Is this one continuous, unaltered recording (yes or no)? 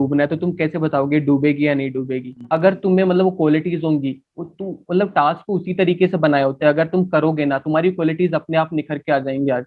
no